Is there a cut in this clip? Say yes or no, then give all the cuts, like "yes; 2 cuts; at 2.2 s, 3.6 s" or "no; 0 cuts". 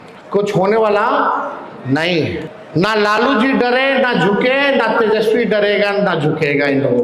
yes; 1 cut; at 2.6 s